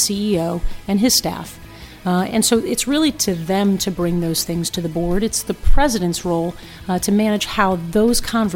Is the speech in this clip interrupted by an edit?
no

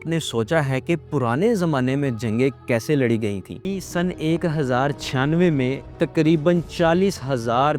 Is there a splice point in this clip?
yes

